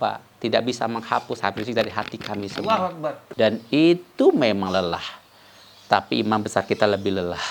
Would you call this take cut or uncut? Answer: cut